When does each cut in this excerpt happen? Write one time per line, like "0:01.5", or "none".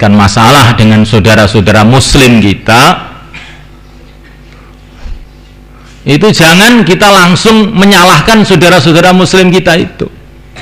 none